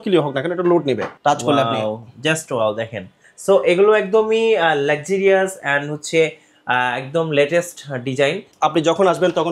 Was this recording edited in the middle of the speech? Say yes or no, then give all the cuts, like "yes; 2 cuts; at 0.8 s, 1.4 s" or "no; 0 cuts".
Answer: yes; 2 cuts; at 1.1 s, 8.5 s